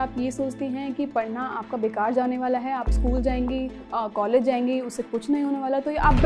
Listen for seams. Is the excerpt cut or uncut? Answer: uncut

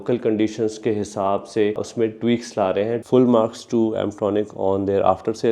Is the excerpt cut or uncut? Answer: cut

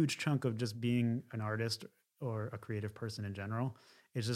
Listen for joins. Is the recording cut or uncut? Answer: uncut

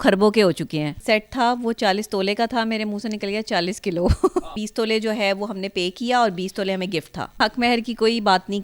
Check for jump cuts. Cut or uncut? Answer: cut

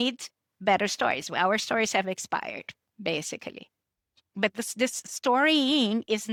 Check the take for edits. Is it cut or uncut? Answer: uncut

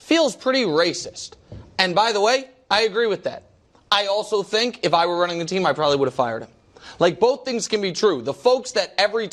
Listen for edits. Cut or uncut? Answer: uncut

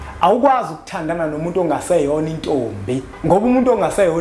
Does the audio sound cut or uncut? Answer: cut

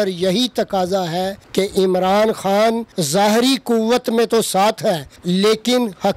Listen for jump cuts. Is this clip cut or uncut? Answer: cut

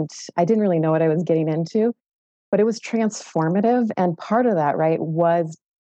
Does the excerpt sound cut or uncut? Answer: uncut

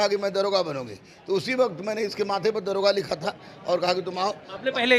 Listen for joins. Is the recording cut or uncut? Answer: uncut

